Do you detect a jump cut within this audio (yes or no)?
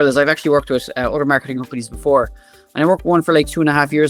no